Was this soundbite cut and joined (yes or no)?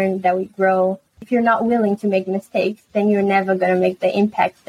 yes